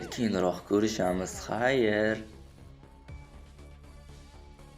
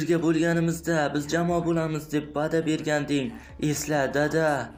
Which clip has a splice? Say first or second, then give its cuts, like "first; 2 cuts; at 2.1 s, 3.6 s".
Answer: first; 1 cut; at 2.3 s